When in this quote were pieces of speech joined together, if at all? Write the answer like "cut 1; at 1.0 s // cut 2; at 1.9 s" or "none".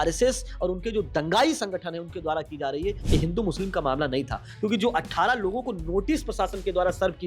cut 1; at 3.0 s